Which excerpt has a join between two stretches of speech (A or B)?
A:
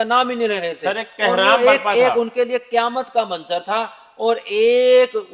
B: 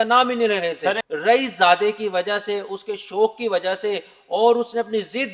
B